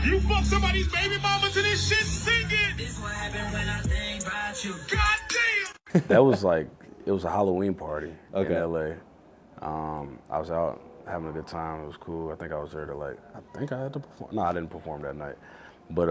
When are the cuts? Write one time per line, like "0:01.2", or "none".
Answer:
none

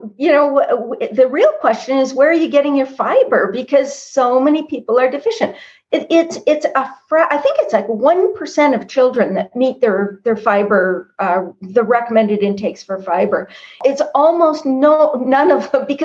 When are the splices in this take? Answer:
0:13.8

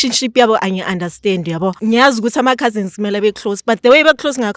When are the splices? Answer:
0:01.8

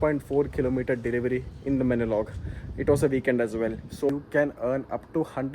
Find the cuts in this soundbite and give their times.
0:04.1

